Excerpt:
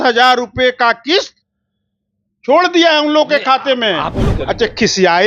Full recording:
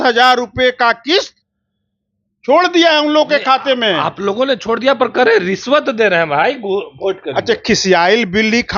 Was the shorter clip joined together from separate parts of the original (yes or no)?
yes